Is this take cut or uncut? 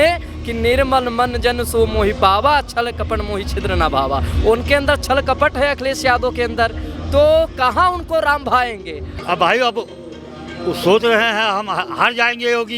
cut